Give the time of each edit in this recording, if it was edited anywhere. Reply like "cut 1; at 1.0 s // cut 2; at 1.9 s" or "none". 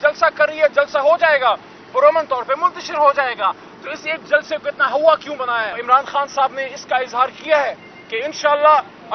cut 1; at 5.7 s